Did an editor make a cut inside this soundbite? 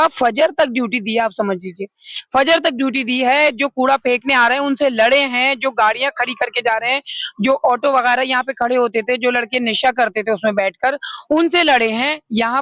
no; 0 cuts

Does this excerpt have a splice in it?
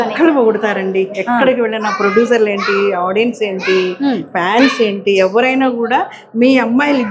no; 0 cuts

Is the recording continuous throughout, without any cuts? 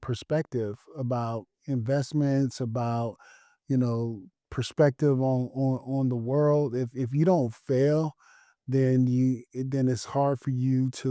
yes; 0 cuts

